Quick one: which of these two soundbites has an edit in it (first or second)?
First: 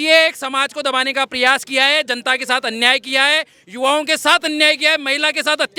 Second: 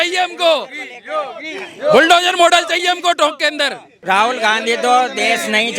second